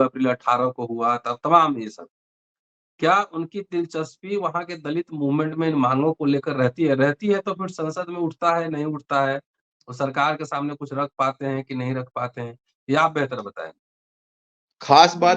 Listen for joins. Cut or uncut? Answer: uncut